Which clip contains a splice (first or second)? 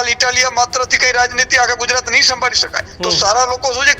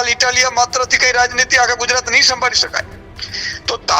first